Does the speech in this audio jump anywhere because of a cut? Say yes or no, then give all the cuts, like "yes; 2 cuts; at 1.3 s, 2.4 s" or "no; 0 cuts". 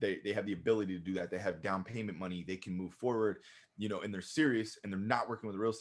no; 0 cuts